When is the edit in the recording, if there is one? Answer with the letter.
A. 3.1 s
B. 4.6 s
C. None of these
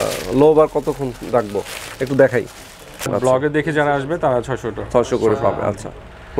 A